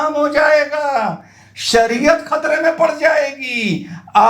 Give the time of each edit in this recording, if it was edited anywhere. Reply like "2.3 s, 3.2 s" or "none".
none